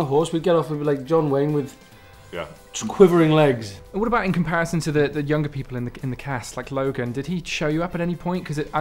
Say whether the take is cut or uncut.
cut